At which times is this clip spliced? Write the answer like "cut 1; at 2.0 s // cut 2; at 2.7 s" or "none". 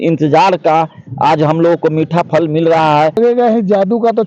cut 1; at 3.2 s